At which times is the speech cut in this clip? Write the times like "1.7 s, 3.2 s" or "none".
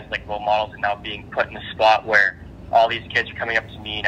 none